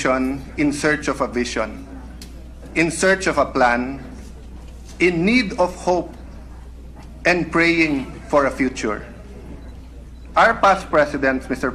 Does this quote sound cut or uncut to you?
uncut